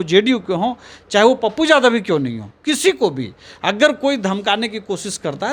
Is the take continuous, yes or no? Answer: yes